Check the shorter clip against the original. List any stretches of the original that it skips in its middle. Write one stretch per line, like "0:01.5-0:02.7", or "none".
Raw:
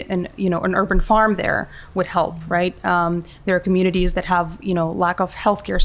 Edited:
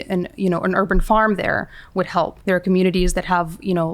0:02.4-0:03.4